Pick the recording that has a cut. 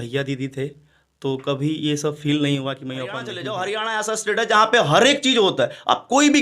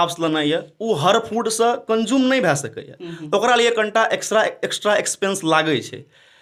first; 1 cut; at 3.3 s

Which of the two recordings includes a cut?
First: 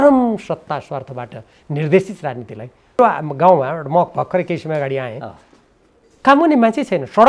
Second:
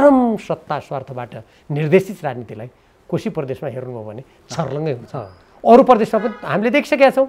first; 1 cut; at 3.0 s

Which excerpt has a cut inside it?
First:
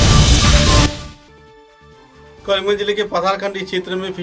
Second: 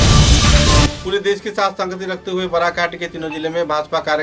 second; 1 cut; at 0.9 s

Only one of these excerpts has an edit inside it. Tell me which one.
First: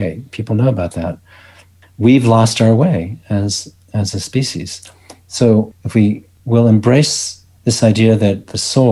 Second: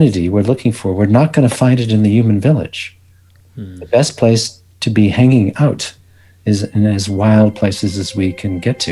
first; 1 cut; at 5.7 s

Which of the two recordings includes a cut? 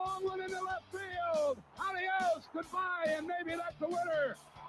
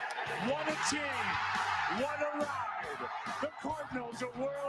first; 1 cut; at 3.6 s

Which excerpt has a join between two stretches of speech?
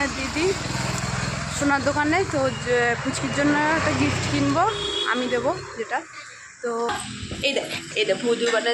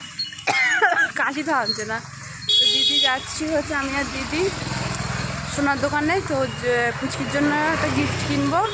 first; 1 cut; at 6.9 s

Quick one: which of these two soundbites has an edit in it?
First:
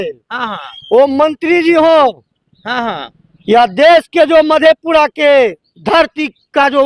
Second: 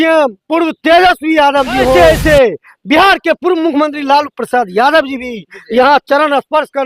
second; 1 cut; at 2.0 s

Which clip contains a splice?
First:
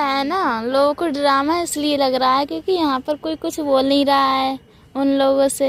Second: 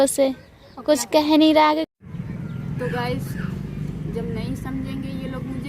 second; 1 cut; at 1.9 s

